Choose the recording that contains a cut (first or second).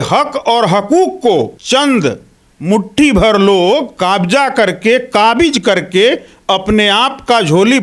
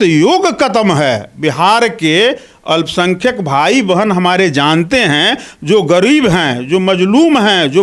first